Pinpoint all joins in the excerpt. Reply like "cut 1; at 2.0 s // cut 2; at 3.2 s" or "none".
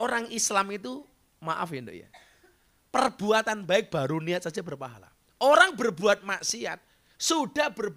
none